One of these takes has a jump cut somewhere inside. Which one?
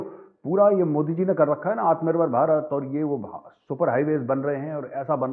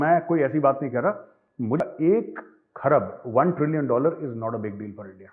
second; 1 cut; at 1.8 s

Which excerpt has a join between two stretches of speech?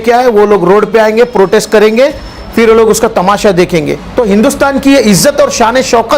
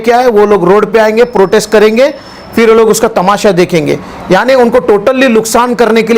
first; 1 cut; at 4.0 s

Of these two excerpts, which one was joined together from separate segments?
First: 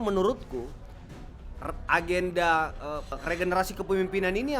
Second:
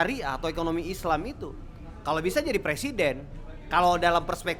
first; 1 cut; at 3.2 s

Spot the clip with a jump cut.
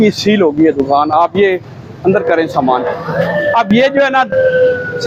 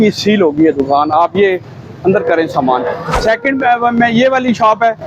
second; 1 cut; at 3.1 s

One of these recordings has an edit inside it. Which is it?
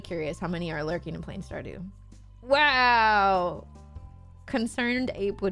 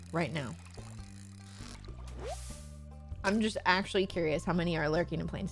second; 1 cut; at 1.8 s

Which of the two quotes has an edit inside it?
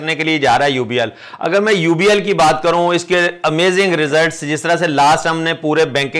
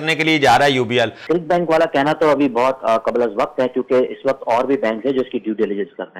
second; 1 cut; at 1.2 s

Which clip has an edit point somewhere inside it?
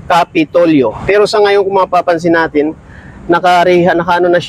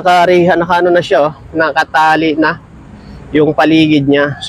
first; 1 cut; at 1.0 s

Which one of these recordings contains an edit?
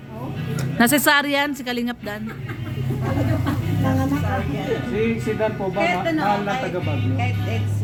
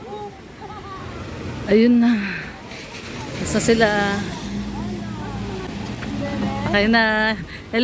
second; 1 cut; at 5.7 s

